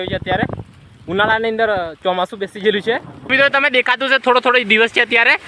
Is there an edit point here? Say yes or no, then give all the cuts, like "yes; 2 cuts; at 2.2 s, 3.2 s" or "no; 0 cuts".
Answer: yes; 1 cut; at 3.3 s